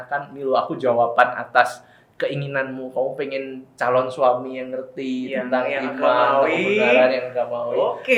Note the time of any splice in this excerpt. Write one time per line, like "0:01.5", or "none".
none